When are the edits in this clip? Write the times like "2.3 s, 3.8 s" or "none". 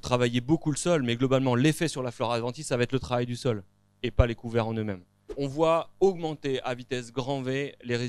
5.4 s